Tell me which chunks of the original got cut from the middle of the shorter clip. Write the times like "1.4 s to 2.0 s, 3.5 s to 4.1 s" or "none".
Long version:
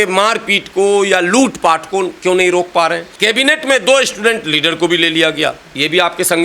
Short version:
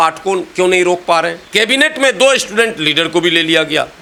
none